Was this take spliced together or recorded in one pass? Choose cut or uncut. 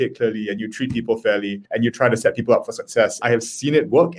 cut